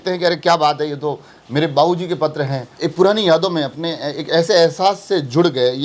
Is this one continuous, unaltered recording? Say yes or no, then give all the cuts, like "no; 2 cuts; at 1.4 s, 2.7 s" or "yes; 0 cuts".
no; 1 cut; at 2.7 s